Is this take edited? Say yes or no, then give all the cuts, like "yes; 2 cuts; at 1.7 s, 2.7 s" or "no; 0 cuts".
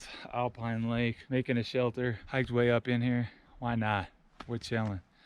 yes; 3 cuts; at 1.2 s, 2.2 s, 3.4 s